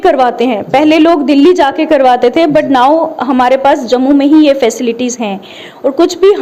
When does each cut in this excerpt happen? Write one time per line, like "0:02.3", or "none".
none